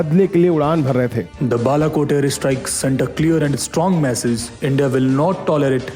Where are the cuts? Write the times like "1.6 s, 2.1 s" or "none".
1.3 s